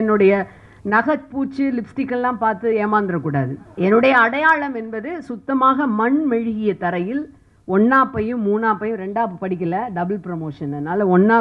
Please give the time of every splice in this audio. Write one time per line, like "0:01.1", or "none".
0:03.6